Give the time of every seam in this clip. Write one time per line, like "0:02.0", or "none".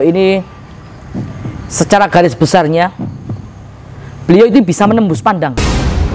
none